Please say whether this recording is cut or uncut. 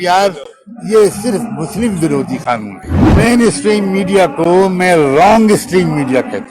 cut